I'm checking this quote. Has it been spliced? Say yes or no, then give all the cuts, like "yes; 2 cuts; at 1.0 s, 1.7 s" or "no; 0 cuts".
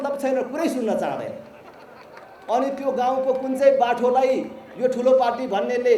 no; 0 cuts